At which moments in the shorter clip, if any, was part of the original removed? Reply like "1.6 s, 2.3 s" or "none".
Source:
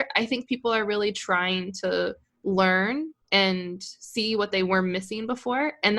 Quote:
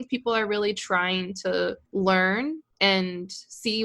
1.8 s